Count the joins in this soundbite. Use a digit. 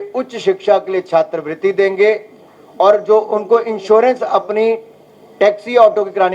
0